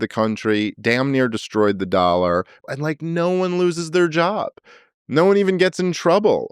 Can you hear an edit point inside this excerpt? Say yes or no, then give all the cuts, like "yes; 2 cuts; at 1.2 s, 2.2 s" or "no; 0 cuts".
yes; 1 cut; at 2.6 s